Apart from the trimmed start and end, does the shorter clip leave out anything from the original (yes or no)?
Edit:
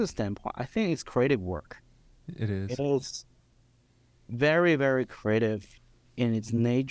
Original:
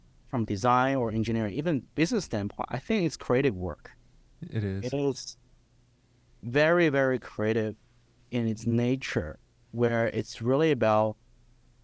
no